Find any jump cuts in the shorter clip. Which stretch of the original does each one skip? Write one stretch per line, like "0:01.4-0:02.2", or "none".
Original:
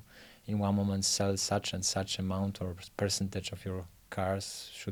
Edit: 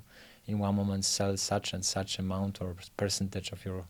none